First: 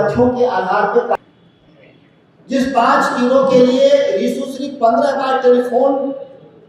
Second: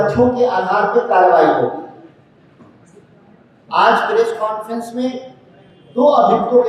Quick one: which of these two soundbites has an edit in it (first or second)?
first